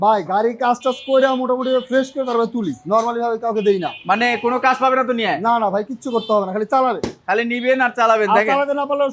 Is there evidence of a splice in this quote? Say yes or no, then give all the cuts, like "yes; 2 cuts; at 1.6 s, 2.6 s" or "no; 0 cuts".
no; 0 cuts